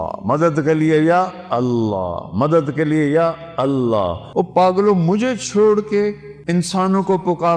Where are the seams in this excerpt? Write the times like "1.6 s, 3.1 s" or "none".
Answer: 4.2 s, 6.3 s